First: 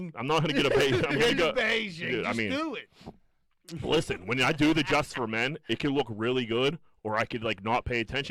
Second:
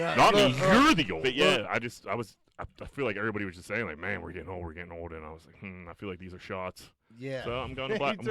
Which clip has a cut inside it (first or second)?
second